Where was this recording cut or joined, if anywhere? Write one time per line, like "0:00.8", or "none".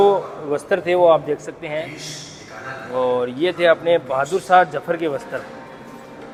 none